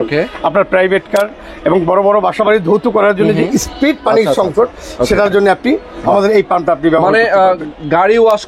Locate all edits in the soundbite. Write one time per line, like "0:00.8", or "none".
none

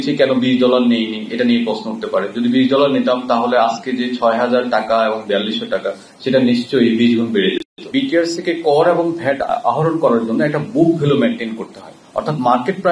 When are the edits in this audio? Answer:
0:07.7

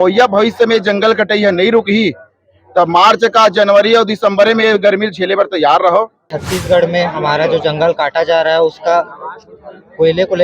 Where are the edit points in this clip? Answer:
0:06.5

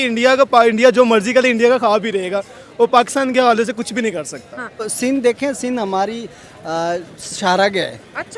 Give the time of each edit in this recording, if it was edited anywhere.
0:04.9

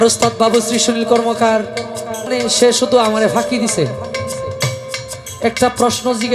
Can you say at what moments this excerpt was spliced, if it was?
0:02.3

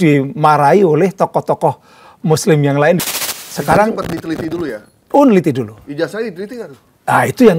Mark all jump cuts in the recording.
0:03.0

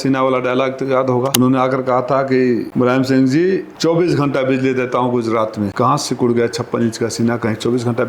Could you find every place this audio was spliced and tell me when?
0:01.3
0:02.7
0:03.7
0:05.7

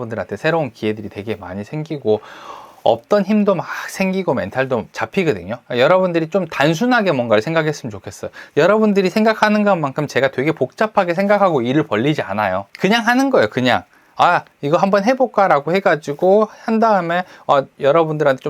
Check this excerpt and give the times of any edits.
0:05.2
0:12.7

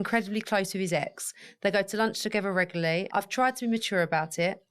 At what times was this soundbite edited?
0:03.1

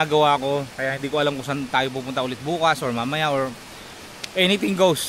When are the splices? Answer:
none

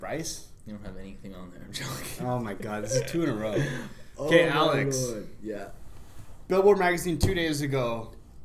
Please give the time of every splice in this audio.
none

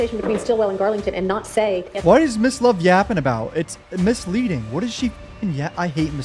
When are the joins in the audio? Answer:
none

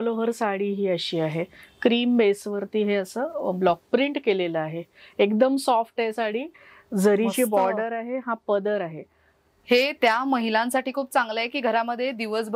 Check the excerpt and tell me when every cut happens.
none

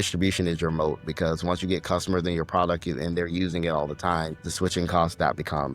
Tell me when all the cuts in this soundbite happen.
0:04.5

